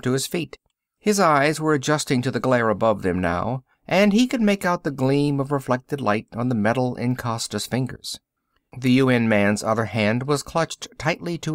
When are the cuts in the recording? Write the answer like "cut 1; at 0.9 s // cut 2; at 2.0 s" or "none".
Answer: cut 1; at 2.5 s